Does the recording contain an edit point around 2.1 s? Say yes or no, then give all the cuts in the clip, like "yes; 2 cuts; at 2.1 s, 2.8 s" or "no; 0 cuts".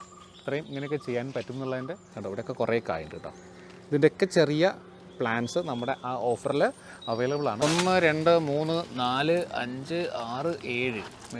yes; 2 cuts; at 2.1 s, 7.6 s